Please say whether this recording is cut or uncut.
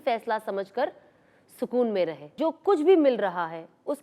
cut